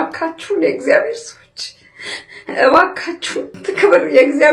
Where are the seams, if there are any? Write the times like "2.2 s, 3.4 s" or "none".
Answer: 3.5 s